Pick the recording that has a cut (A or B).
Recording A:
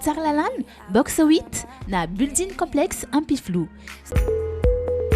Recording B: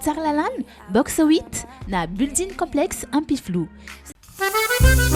A